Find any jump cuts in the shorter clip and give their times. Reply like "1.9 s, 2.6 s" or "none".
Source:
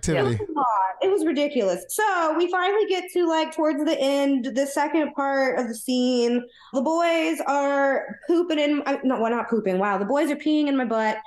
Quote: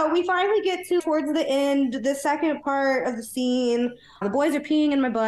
1.0 s, 4.2 s